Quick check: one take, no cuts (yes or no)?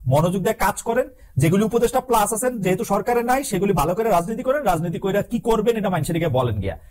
yes